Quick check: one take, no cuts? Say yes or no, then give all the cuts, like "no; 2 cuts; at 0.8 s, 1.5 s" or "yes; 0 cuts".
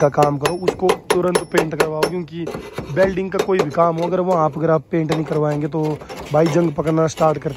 yes; 0 cuts